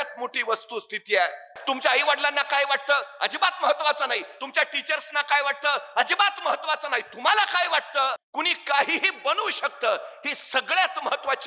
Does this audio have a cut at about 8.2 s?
yes; 2 cuts; at 1.5 s, 8.2 s

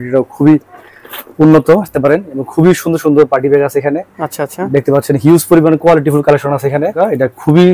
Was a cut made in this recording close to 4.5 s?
no; 2 cuts; at 1.9 s, 6.9 s

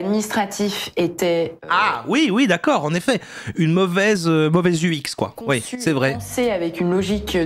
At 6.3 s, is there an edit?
no; 0 cuts

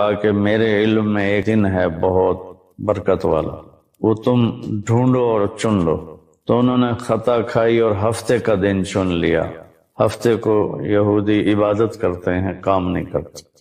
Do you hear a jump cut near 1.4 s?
yes; 1 cut; at 1.4 s

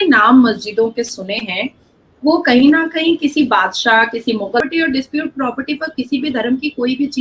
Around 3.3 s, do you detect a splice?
no; 1 cut; at 4.6 s

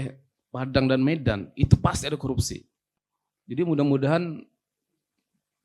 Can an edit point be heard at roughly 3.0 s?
no; 0 cuts

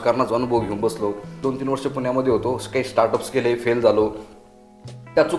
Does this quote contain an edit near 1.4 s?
yes; 1 cut; at 1.4 s

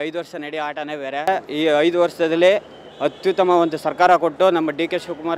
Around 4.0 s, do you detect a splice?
no; 1 cut; at 1.3 s

